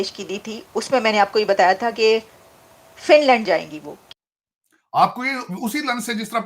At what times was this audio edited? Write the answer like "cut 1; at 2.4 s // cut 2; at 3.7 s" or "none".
cut 1; at 4.0 s